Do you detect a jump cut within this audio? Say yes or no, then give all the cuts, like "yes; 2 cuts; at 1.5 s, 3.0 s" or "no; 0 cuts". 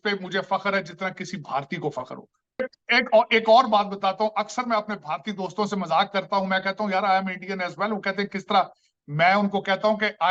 no; 0 cuts